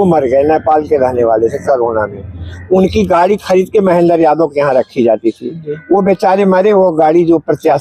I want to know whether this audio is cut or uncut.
uncut